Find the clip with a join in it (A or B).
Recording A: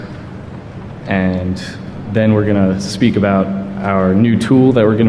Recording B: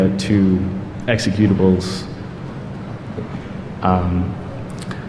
B